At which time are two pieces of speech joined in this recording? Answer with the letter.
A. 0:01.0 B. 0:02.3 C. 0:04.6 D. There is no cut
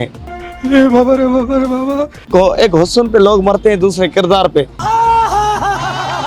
B